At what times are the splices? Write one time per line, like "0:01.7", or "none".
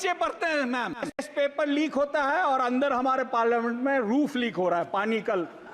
0:01.3